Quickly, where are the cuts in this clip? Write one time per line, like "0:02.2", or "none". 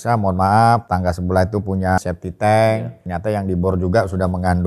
0:00.8
0:02.0
0:03.0